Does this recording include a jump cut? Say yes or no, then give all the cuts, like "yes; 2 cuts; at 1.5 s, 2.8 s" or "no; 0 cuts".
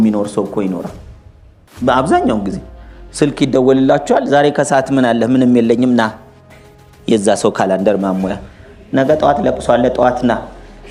no; 0 cuts